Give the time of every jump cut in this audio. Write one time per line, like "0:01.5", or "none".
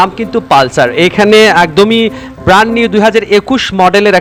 none